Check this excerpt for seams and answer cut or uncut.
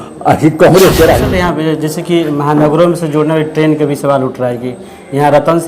cut